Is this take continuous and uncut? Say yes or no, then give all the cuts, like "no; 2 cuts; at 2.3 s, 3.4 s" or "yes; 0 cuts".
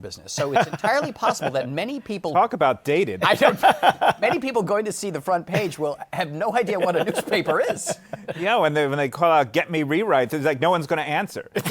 yes; 0 cuts